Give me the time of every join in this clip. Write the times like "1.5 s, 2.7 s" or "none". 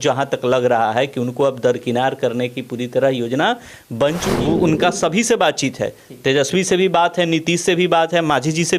4.3 s